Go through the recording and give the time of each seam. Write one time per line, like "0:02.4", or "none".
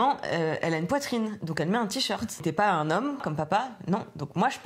0:02.4
0:03.2